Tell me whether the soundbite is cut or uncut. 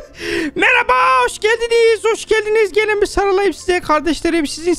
uncut